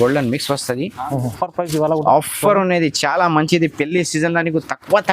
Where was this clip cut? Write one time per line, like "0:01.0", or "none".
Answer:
0:01.4